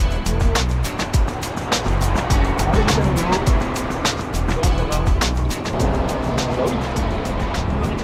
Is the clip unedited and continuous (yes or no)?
yes